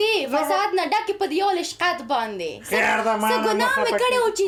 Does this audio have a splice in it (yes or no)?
no